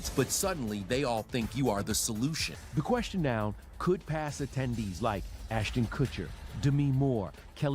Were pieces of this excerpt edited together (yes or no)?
yes